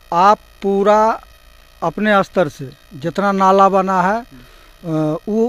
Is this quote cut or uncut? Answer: uncut